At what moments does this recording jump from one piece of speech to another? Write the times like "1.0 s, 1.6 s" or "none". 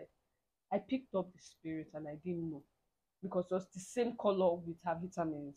none